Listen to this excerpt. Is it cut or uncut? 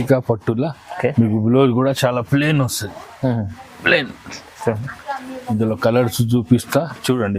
uncut